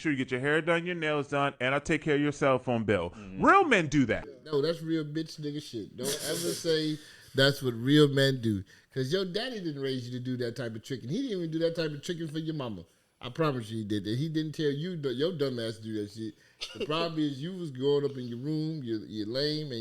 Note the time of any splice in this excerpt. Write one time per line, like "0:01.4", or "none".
0:04.3